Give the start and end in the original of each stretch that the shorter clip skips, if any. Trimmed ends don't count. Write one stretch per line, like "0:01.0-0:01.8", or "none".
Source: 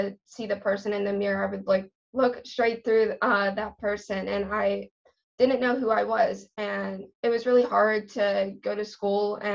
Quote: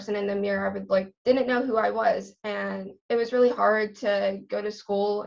0:01.9-0:05.3